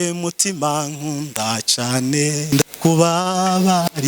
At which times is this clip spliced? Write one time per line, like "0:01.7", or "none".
0:02.5